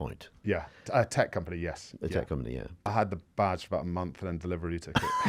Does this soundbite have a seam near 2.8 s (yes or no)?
yes